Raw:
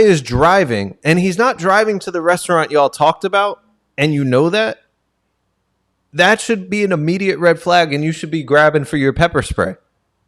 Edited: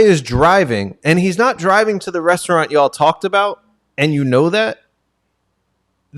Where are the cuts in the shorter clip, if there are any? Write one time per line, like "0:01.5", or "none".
none